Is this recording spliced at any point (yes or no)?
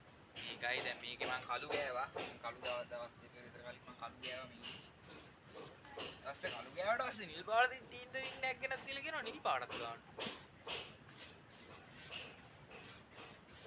no